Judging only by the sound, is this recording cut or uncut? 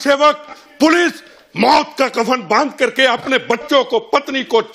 uncut